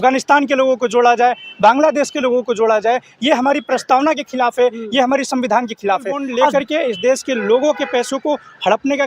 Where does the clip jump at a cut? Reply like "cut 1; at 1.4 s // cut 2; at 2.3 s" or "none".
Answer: cut 1; at 6.5 s